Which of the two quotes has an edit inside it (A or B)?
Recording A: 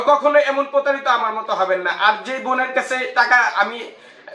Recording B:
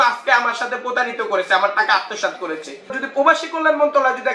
B